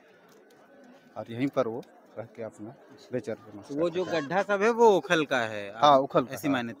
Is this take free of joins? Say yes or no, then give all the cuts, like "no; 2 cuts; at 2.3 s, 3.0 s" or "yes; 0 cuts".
yes; 0 cuts